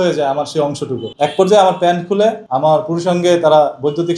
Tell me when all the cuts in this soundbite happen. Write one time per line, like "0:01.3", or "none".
0:01.0
0:02.5